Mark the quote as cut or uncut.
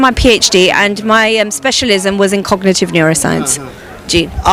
uncut